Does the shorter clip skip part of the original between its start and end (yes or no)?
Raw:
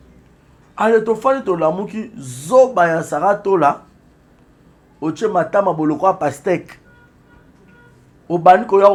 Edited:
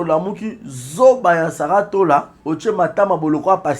yes